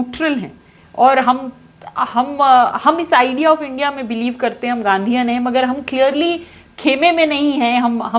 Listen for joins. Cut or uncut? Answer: uncut